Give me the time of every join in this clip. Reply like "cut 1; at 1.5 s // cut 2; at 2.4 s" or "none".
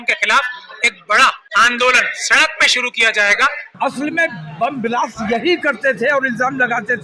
cut 1; at 1.4 s // cut 2; at 3.6 s